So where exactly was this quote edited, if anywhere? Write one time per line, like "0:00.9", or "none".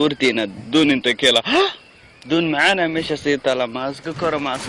0:02.3